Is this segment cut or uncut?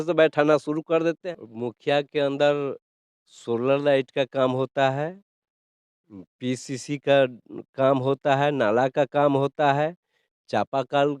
cut